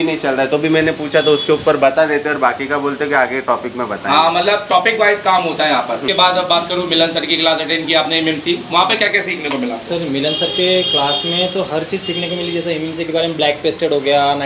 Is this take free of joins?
no; 1 cut; at 6.0 s

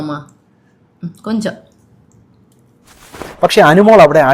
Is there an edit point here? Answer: yes; 1 cut; at 3.3 s

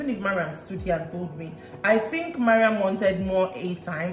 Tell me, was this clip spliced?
no; 0 cuts

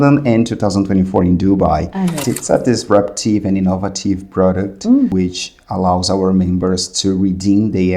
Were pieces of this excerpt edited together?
yes; 2 cuts; at 2.2 s, 5.1 s

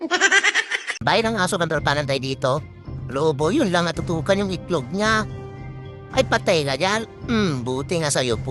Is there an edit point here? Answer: yes; 1 cut; at 1.0 s

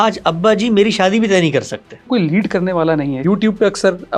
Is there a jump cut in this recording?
yes; 2 cuts; at 2.1 s, 3.2 s

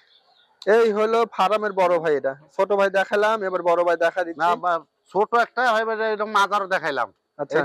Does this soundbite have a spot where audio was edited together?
no; 0 cuts

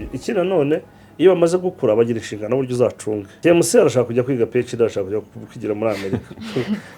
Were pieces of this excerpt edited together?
yes; 1 cut; at 3.3 s

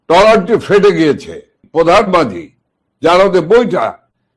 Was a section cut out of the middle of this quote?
yes; 1 cut; at 1.6 s

